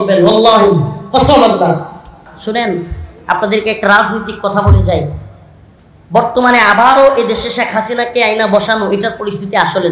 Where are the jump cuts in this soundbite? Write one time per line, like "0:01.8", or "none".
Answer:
0:02.3